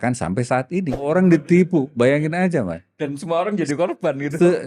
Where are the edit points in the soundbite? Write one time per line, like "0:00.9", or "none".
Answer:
0:01.1